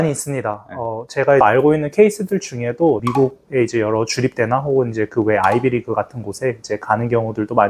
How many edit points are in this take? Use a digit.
2